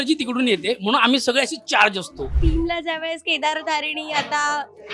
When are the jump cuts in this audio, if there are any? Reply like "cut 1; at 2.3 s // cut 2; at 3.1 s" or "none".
cut 1; at 2.3 s

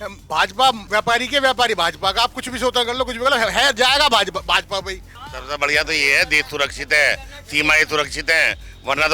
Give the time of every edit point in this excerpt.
cut 1; at 0.8 s // cut 2; at 5.1 s

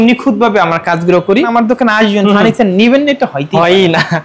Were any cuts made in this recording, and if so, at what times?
cut 1; at 1.5 s

